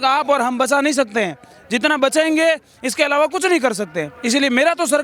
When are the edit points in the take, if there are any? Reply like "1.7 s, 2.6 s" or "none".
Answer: none